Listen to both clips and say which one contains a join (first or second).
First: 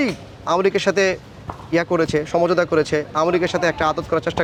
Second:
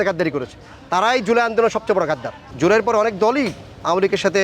second